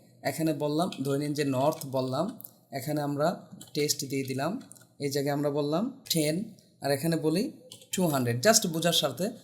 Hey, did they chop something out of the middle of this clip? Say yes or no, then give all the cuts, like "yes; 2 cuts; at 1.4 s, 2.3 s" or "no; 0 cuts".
yes; 1 cut; at 6.0 s